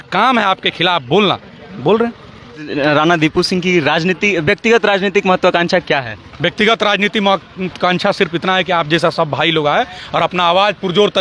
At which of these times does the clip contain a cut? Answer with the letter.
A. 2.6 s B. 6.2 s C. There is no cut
A